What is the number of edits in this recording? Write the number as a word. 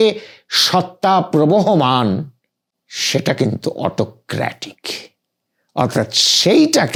zero